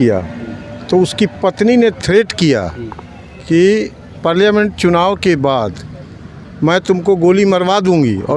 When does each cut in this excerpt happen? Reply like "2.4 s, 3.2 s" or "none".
none